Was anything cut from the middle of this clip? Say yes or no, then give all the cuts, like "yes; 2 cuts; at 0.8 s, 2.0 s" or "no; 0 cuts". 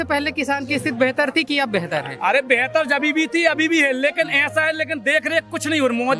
no; 0 cuts